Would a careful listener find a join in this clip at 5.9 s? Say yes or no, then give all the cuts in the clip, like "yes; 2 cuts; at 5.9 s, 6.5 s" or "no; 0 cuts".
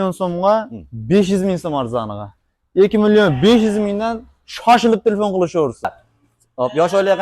yes; 1 cut; at 5.9 s